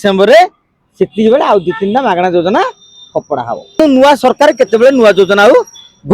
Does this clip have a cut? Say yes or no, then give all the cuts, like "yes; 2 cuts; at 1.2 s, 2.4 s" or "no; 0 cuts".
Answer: yes; 1 cut; at 3.8 s